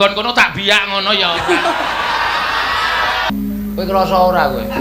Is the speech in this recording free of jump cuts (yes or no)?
no